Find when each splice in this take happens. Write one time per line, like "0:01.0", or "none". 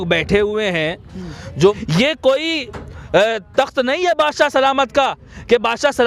0:01.8